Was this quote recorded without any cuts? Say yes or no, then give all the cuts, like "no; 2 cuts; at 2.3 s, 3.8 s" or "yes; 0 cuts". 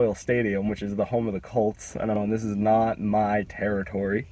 no; 1 cut; at 2.2 s